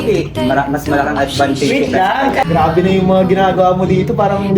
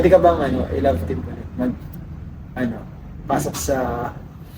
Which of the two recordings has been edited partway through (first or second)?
first